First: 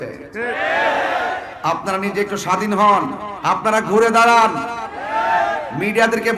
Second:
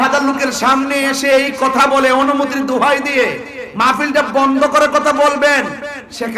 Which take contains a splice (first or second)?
first